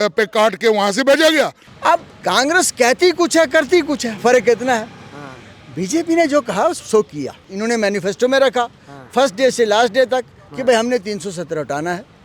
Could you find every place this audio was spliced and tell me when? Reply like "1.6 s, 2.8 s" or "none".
1.6 s, 7.4 s